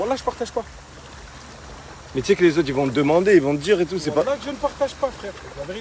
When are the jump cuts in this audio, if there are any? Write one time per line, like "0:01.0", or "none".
none